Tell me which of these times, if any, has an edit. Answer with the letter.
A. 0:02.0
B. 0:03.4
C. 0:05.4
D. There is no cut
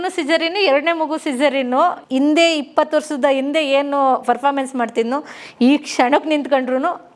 A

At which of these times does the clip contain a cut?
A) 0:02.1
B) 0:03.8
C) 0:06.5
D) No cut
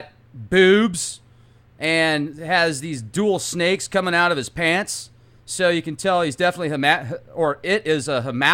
C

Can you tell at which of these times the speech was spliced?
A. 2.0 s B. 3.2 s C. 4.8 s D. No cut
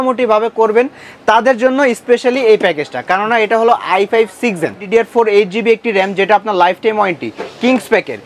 C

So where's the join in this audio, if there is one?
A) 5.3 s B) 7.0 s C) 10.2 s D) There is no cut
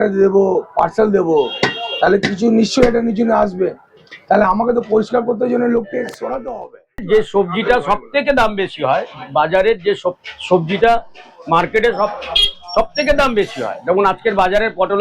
B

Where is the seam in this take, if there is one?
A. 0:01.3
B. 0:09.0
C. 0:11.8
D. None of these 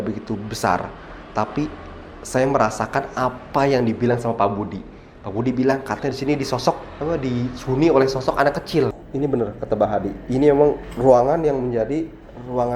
B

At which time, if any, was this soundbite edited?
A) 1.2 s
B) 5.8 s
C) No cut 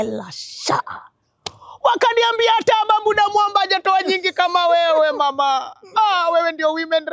C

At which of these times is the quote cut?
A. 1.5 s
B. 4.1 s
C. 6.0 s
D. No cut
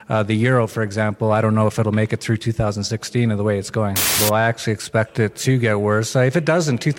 B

